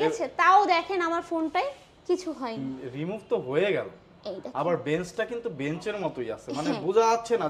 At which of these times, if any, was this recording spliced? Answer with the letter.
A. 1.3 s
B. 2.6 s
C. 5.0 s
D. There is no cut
B